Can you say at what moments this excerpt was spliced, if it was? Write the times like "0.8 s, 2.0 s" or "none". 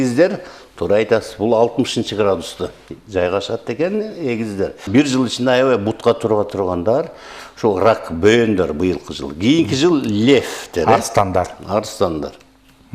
4.8 s

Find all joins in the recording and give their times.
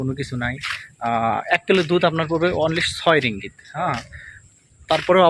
none

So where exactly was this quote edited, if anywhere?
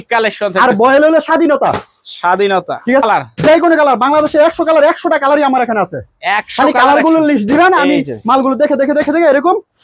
3.0 s

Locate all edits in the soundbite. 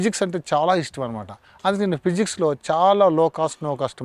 none

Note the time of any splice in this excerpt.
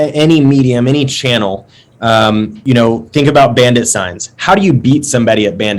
2.5 s

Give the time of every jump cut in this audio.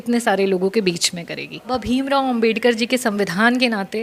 1.7 s

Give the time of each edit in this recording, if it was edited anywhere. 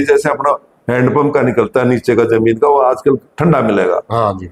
none

